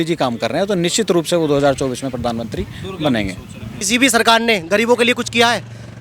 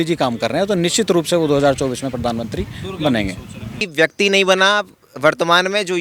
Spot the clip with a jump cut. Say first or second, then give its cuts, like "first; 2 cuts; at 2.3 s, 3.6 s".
second; 1 cut; at 3.8 s